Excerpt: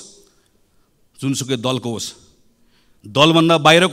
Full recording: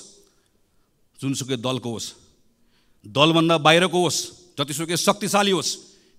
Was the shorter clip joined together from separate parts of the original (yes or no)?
no